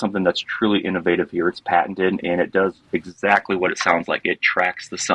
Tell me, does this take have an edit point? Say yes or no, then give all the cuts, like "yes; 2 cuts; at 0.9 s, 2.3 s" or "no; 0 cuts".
no; 0 cuts